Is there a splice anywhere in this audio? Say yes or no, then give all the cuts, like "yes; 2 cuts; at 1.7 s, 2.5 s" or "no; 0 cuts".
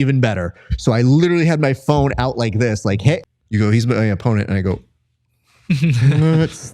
yes; 1 cut; at 3.2 s